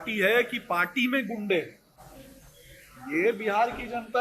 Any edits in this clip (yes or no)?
no